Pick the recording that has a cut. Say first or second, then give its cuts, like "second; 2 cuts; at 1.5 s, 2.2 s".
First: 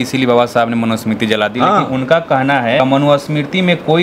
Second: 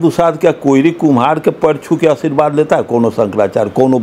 first; 1 cut; at 2.8 s